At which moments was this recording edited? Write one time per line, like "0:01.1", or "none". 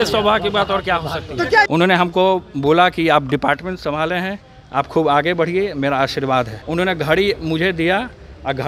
0:01.7
0:06.6